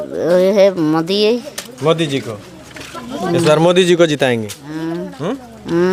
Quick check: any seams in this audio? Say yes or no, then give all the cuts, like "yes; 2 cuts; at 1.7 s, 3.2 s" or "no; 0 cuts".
no; 0 cuts